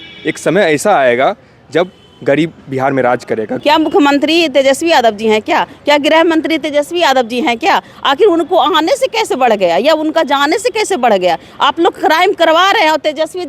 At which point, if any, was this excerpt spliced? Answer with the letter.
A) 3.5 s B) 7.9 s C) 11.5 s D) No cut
A